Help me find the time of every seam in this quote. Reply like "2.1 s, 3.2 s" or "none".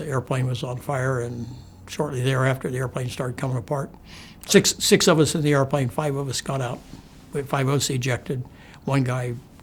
none